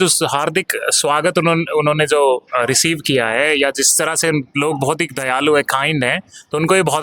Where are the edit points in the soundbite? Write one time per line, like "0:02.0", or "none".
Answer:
none